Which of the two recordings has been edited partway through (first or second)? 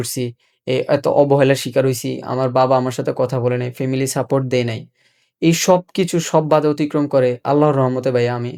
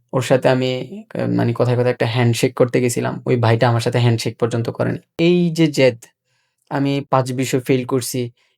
second